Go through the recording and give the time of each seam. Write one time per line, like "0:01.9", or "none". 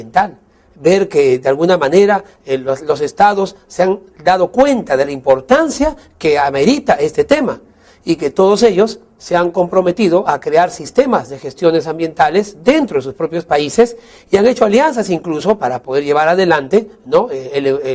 0:04.5